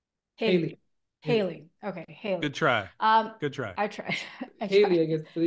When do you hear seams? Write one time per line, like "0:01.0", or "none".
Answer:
0:04.5